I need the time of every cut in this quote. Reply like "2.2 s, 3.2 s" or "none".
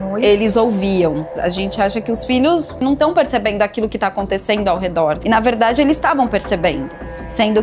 1.3 s, 2.8 s